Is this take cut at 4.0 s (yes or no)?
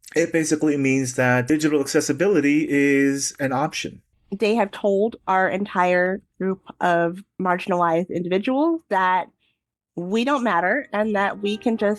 yes